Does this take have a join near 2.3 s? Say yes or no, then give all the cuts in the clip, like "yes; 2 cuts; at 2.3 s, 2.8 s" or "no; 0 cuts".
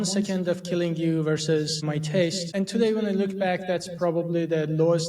yes; 1 cut; at 2.3 s